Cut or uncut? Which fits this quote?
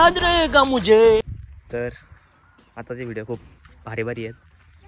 cut